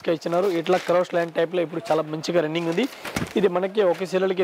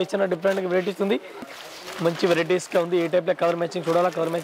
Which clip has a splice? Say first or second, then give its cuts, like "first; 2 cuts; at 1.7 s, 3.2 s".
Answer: second; 1 cut; at 1.5 s